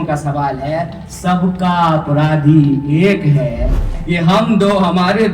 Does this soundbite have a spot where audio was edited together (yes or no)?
yes